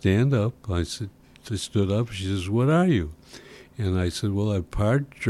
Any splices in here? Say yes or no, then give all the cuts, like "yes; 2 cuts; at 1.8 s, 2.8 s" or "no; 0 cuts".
no; 0 cuts